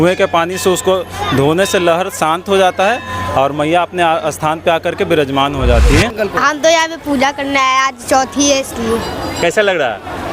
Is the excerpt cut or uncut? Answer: cut